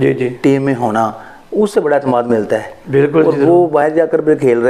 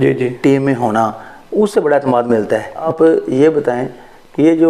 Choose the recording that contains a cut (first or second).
second